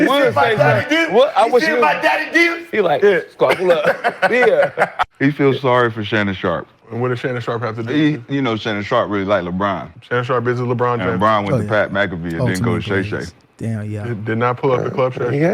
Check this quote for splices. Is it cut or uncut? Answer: cut